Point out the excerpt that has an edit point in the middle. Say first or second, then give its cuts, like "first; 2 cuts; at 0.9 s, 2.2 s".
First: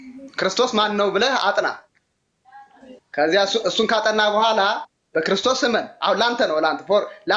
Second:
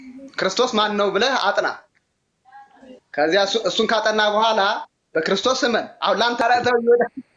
second; 1 cut; at 6.4 s